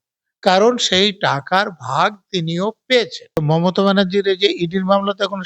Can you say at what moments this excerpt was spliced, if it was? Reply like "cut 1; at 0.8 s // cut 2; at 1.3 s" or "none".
cut 1; at 3.4 s